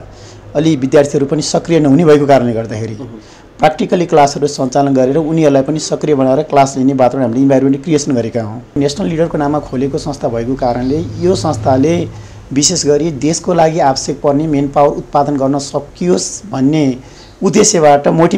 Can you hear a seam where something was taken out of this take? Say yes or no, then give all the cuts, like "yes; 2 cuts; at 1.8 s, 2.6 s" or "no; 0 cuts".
yes; 1 cut; at 8.8 s